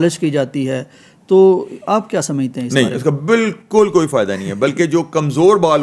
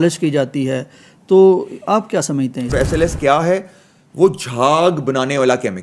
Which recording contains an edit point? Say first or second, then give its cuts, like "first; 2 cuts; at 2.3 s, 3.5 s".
second; 1 cut; at 2.7 s